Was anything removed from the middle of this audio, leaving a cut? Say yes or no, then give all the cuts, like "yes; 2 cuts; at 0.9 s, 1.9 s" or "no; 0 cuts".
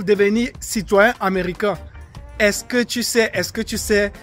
no; 0 cuts